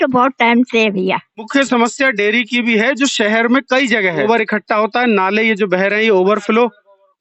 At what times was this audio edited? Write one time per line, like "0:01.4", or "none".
0:01.5
0:04.2